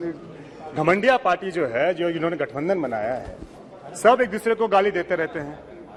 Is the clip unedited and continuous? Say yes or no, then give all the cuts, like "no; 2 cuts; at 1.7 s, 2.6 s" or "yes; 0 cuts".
yes; 0 cuts